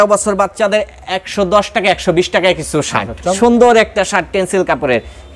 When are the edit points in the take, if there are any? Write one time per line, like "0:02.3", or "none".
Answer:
0:03.3